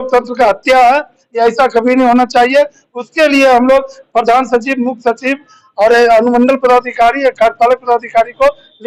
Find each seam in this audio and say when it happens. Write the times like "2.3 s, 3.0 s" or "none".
none